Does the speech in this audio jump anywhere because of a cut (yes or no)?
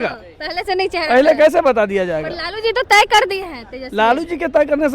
no